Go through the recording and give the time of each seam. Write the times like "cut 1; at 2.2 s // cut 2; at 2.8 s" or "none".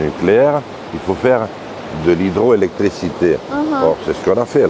none